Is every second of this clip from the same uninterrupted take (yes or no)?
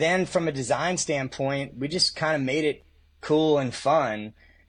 yes